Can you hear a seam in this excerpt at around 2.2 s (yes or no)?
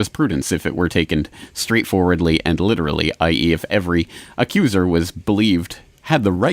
yes